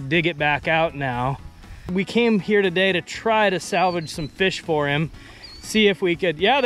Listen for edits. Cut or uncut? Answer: cut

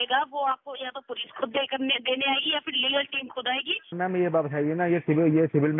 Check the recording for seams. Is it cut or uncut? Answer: cut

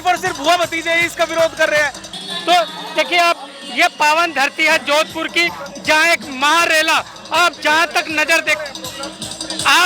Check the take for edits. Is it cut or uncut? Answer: cut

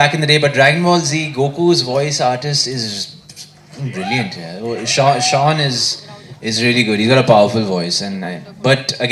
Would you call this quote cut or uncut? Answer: uncut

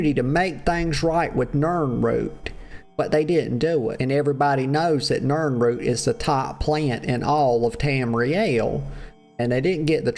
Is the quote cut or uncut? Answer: cut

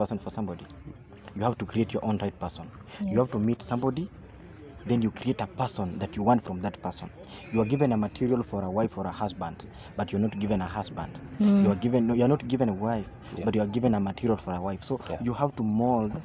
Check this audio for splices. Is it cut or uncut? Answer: uncut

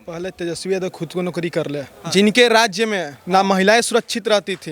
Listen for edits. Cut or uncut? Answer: cut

